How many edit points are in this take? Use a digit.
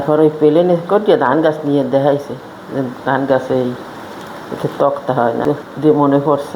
1